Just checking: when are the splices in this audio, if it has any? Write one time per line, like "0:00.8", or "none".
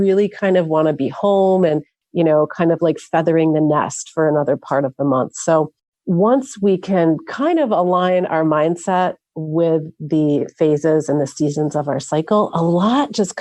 none